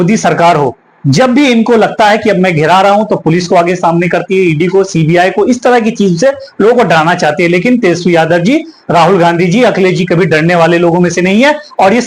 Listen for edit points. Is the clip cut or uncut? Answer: uncut